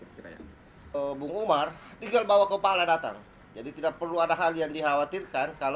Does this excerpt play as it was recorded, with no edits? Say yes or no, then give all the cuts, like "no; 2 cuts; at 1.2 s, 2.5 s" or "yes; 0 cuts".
no; 1 cut; at 0.9 s